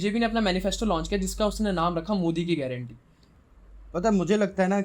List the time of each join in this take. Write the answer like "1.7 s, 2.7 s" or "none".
3.5 s